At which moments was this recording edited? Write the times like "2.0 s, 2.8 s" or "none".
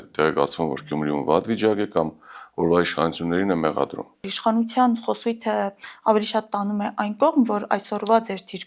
4.3 s